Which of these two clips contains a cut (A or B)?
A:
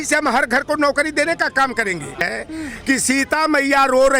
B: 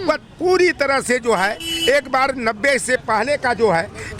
A